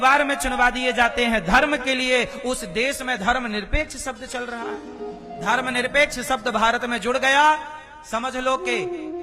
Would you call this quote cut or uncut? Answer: cut